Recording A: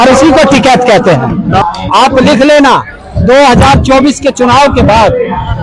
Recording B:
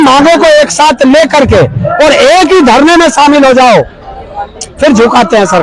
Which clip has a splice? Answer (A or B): A